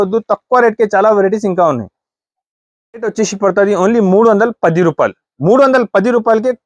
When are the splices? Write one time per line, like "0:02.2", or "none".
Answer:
0:02.9